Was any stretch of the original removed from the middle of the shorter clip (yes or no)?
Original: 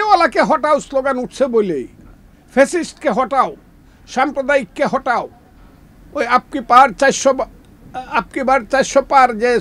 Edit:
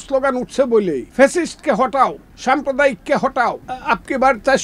yes